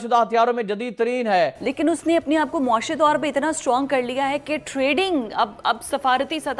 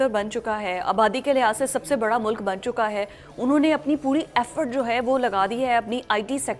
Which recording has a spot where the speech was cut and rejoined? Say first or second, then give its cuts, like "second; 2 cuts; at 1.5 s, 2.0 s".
first; 1 cut; at 1.6 s